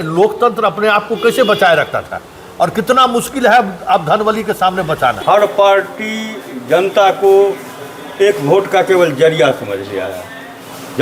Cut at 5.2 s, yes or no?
yes